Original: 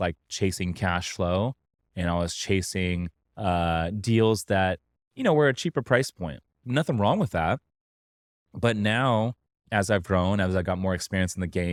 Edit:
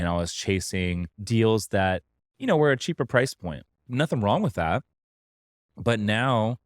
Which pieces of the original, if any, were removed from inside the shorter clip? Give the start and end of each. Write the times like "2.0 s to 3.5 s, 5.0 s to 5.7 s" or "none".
3.2 s to 4.0 s